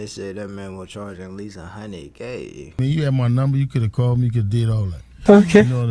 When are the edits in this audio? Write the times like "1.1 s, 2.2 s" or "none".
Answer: 2.8 s